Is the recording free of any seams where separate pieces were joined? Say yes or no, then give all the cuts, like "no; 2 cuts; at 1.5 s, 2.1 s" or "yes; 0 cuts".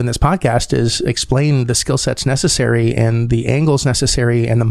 yes; 0 cuts